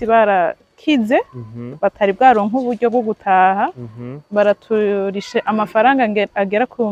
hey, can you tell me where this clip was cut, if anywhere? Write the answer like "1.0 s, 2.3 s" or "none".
none